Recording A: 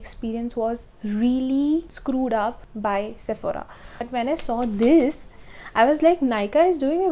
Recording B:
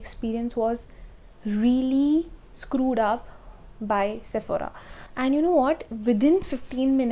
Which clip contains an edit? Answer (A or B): A